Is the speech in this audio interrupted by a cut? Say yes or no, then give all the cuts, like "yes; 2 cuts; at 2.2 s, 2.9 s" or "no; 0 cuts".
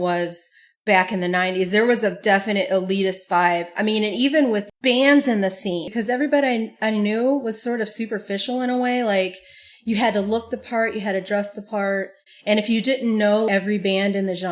yes; 2 cuts; at 5.9 s, 13.5 s